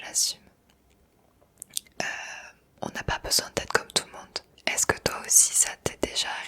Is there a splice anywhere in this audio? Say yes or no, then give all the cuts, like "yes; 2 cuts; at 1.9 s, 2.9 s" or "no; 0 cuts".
yes; 1 cut; at 4.4 s